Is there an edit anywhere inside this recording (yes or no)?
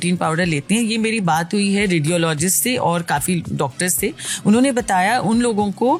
no